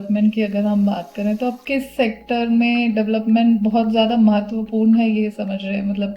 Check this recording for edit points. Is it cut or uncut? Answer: uncut